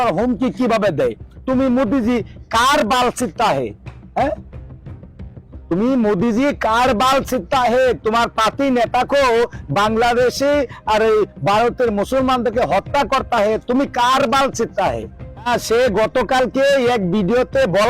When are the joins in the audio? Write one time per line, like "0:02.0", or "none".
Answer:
0:15.5